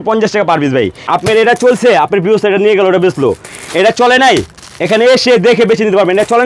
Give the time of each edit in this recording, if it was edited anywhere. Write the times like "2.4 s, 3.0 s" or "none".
1.0 s